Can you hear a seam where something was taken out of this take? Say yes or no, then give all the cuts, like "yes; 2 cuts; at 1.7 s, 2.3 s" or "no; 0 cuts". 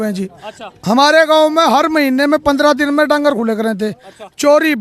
no; 0 cuts